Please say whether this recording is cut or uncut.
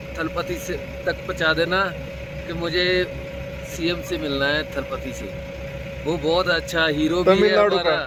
uncut